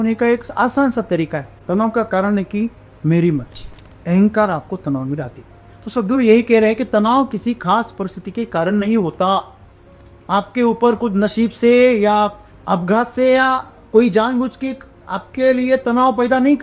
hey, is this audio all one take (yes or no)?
no